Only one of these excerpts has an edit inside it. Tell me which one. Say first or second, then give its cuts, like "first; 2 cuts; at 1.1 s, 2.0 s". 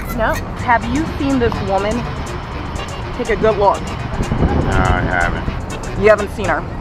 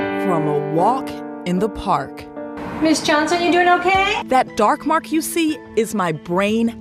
second; 1 cut; at 4.2 s